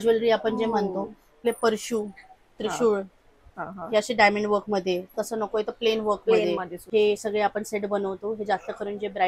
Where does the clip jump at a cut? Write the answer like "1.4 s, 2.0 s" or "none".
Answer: 1.4 s, 6.7 s